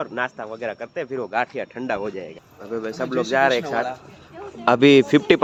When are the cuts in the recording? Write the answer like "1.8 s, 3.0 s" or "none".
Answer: none